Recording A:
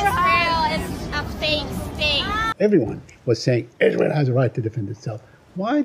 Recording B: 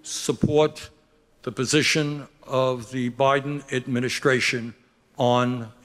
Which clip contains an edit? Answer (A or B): A